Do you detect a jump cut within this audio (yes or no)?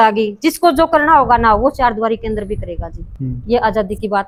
no